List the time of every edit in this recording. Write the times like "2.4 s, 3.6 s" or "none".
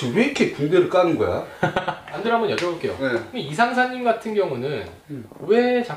2.2 s